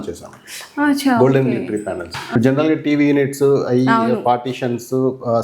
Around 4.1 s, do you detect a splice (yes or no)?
no